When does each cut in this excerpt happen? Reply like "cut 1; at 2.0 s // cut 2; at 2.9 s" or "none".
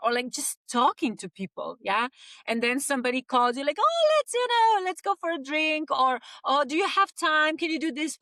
none

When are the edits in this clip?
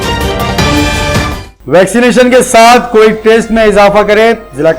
cut 1; at 1.1 s

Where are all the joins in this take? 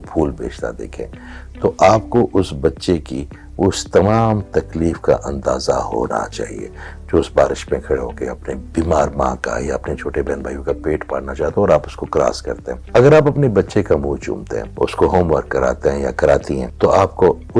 cut 1; at 8.7 s // cut 2; at 12.7 s // cut 3; at 14.6 s // cut 4; at 16.6 s

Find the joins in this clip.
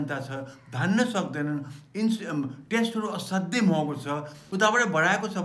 cut 1; at 4.4 s

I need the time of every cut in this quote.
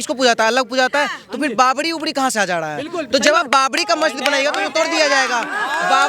none

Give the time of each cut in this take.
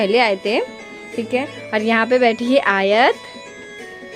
none

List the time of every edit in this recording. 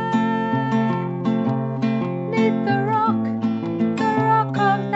none

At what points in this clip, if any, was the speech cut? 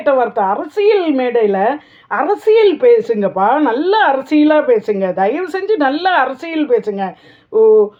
none

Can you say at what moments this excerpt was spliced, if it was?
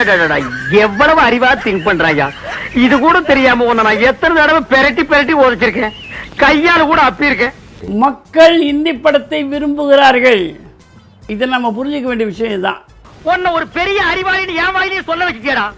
cut 1; at 7.8 s // cut 2; at 13.1 s

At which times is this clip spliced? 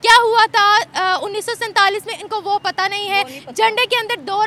none

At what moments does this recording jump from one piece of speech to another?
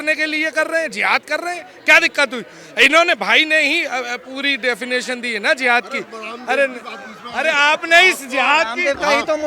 none

